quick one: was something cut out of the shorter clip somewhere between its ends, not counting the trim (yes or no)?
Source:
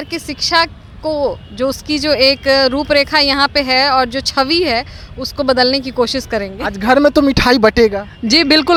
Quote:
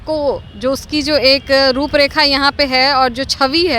no